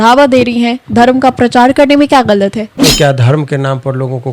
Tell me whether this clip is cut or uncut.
cut